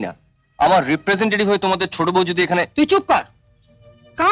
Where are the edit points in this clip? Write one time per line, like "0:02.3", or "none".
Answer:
none